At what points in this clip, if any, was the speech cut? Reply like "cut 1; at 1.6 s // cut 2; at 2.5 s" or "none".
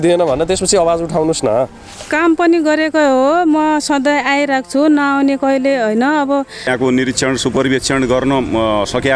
cut 1; at 6.7 s

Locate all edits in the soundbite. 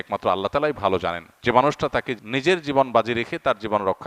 cut 1; at 1.3 s // cut 2; at 2.2 s

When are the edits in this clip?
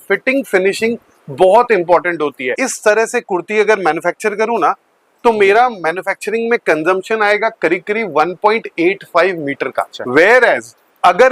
cut 1; at 2.6 s // cut 2; at 9.9 s

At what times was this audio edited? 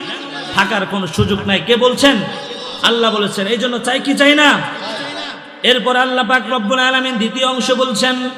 none

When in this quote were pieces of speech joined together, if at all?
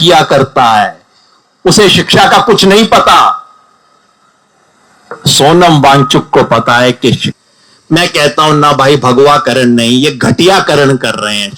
cut 1; at 7.3 s

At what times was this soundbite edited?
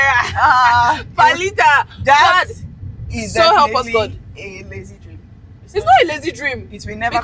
none

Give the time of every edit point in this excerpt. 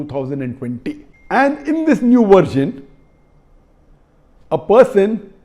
cut 1; at 1.1 s

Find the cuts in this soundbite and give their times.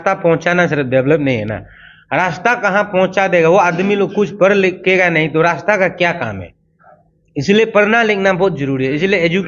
none

